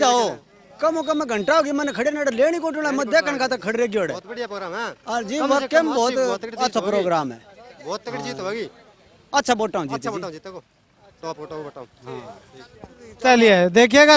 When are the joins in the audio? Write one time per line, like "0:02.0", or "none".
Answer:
none